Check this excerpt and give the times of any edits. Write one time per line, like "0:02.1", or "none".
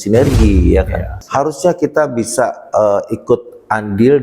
0:01.2